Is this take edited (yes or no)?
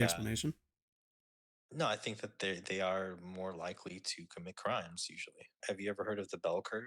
yes